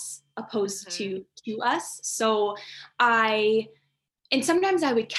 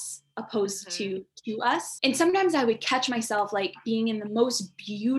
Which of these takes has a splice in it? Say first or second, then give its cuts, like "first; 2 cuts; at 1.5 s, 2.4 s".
second; 1 cut; at 1.9 s